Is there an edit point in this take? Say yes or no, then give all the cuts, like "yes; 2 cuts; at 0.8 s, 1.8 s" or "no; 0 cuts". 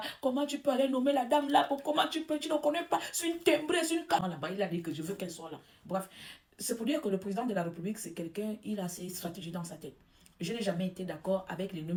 no; 0 cuts